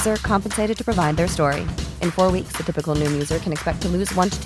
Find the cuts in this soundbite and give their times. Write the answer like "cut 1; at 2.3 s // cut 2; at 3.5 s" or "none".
none